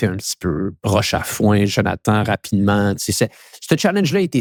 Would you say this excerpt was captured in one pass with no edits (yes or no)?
yes